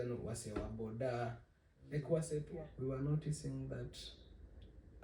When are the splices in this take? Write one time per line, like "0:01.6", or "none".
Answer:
0:02.5